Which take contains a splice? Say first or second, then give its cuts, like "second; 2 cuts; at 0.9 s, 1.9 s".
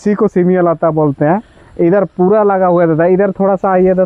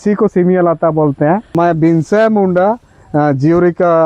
second; 1 cut; at 1.5 s